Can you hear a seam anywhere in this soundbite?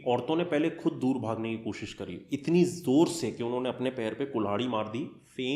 no; 0 cuts

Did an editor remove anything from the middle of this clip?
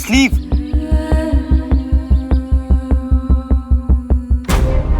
no; 0 cuts

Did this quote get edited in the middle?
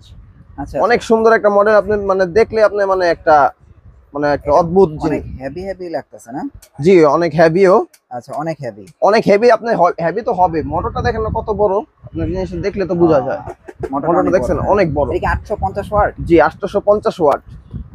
no; 0 cuts

